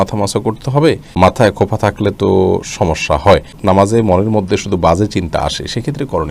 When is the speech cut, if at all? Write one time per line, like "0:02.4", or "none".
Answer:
0:01.1
0:03.6